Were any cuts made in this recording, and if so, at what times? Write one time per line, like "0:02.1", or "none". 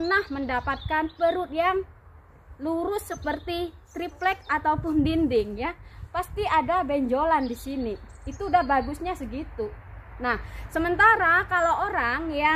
0:03.1